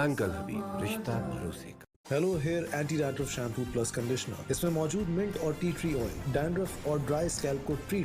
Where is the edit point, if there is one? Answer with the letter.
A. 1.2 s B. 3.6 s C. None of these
A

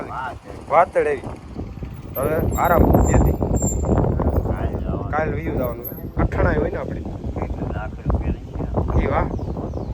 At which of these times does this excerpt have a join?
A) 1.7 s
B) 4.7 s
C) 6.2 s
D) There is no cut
C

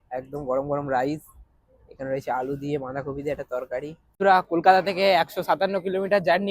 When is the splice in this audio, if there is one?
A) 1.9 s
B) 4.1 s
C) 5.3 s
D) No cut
B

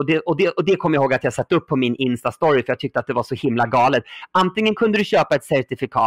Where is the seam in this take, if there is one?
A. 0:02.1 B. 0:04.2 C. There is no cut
C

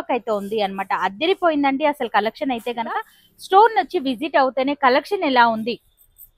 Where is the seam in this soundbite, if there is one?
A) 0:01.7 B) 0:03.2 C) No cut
B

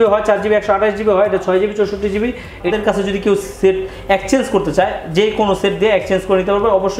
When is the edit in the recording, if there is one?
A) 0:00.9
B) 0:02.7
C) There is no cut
B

